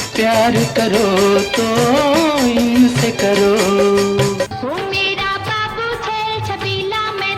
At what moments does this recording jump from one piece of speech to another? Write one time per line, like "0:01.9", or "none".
0:04.5